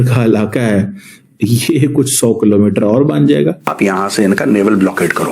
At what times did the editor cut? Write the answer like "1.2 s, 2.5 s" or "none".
3.7 s